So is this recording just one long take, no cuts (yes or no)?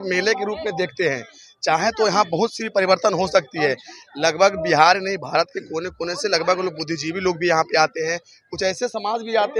yes